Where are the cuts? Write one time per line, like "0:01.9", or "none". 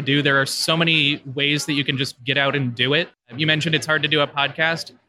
none